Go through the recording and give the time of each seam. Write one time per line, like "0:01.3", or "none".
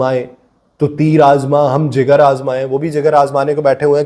none